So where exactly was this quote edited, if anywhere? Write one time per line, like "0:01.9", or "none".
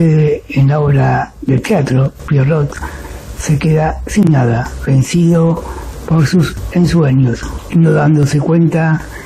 0:07.5